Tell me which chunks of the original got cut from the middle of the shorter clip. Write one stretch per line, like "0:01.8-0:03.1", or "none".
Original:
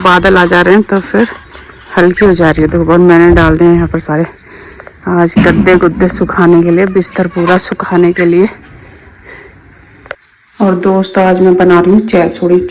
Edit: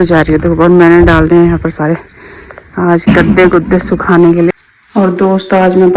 0:06.8-0:10.1